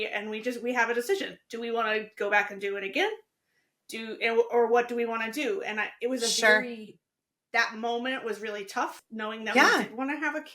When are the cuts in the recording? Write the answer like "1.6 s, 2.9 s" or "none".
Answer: 9.0 s